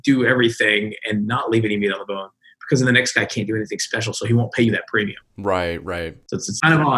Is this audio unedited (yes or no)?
yes